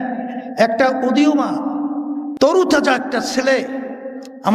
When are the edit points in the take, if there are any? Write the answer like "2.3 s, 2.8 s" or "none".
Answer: none

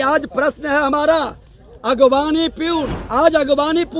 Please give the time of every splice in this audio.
3.0 s

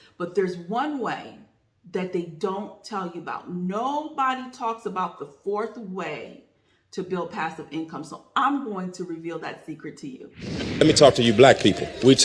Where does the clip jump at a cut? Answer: 10.4 s

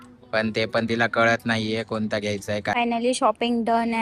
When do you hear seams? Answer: 2.7 s

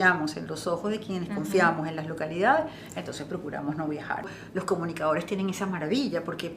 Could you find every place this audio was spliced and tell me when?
4.3 s

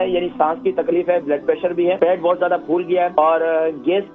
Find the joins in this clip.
2.0 s, 3.1 s

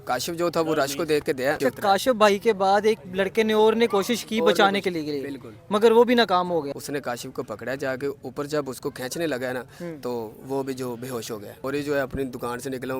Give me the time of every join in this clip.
1.6 s, 6.8 s, 11.5 s

